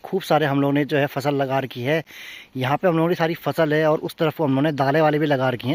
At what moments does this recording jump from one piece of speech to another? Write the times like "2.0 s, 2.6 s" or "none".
none